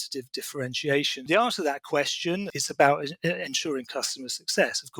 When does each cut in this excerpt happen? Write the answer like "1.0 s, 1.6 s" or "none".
1.2 s, 2.5 s